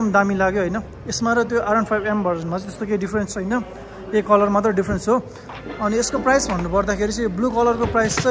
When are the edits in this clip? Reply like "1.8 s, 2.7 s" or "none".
none